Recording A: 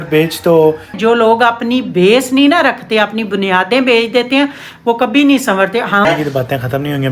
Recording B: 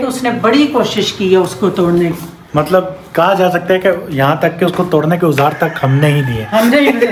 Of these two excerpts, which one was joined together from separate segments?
A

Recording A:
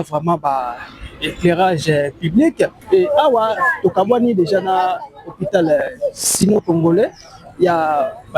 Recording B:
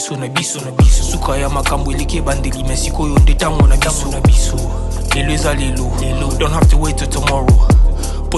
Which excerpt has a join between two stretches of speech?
A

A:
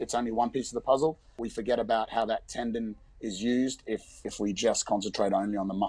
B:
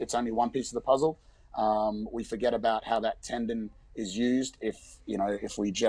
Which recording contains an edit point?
A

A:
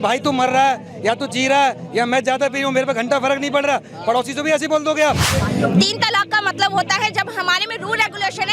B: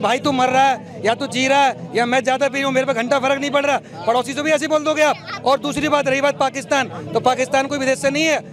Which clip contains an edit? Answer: A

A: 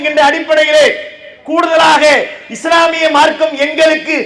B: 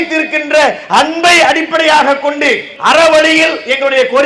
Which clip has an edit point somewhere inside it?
B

